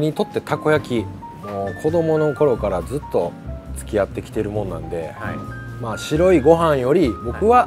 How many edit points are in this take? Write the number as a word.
zero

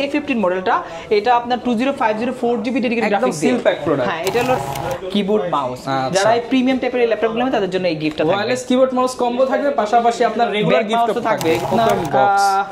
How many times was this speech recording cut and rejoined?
two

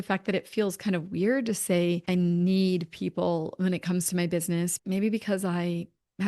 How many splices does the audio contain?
one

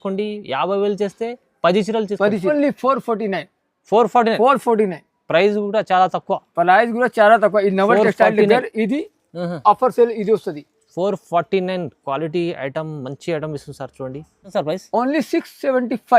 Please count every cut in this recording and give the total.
two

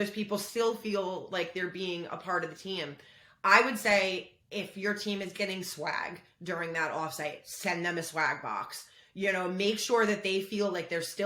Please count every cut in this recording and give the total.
zero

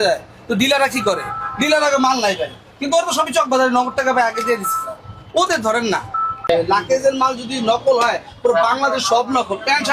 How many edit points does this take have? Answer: one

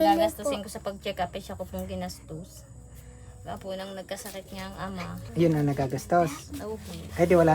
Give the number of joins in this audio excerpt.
one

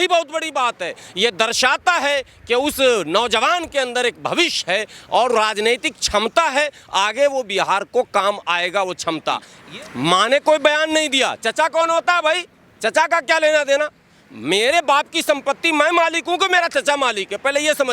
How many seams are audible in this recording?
one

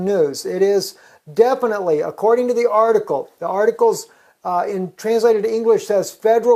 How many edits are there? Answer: zero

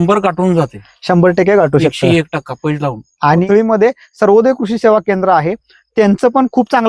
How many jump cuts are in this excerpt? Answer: one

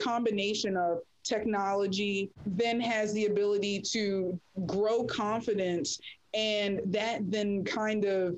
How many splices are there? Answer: one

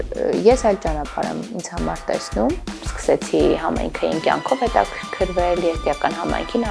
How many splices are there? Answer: one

